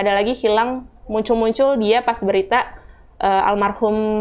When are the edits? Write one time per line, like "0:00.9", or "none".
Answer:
none